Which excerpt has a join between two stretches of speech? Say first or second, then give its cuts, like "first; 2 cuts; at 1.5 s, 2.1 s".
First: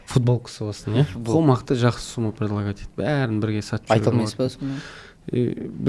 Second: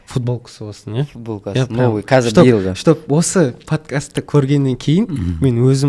first; 1 cut; at 1.3 s